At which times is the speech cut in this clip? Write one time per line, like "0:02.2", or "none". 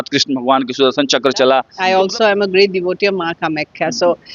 0:01.7